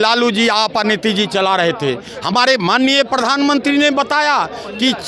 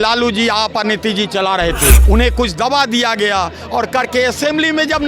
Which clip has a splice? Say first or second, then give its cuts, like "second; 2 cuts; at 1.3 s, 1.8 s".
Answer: second; 1 cut; at 2.0 s